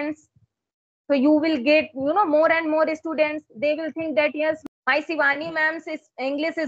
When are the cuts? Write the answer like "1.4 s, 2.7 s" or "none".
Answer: 4.6 s